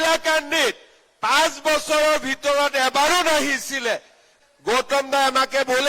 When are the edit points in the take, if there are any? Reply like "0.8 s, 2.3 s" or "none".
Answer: 4.3 s